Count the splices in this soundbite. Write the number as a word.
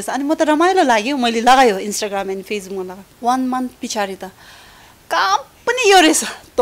one